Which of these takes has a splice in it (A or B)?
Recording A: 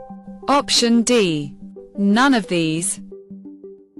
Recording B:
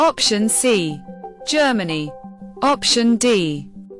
A